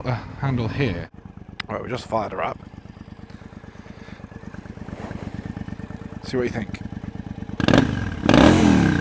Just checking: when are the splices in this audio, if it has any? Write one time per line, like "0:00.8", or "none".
0:01.1